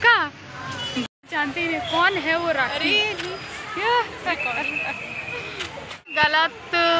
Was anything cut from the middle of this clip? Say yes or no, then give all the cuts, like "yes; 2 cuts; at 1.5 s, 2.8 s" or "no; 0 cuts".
no; 0 cuts